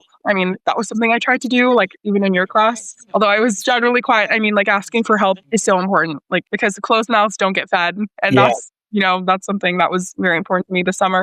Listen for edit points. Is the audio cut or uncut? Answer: cut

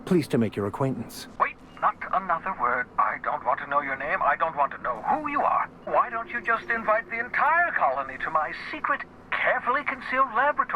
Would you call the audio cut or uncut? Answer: cut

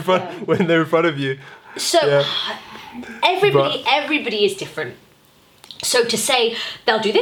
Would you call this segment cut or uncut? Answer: uncut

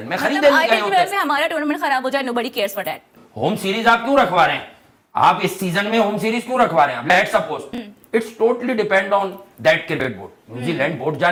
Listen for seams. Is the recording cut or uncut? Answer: uncut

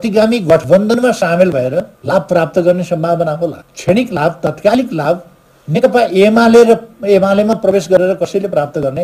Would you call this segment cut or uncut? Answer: cut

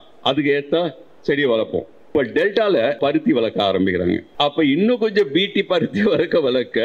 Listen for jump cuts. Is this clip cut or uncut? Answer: cut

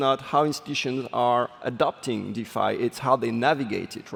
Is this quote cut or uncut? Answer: uncut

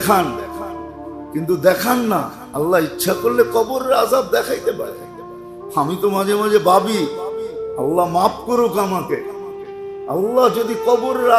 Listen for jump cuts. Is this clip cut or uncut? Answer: uncut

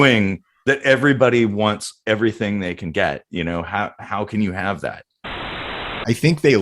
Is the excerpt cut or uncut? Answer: cut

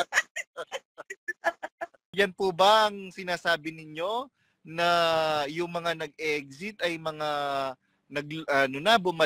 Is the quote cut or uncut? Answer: cut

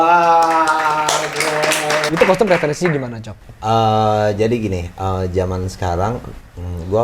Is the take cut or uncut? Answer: cut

